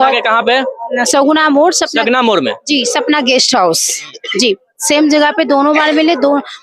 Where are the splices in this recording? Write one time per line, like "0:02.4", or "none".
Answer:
none